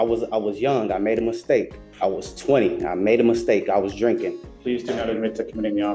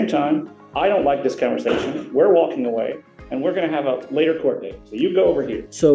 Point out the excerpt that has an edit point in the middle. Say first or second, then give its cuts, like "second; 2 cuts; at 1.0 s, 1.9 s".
first; 2 cuts; at 1.8 s, 4.5 s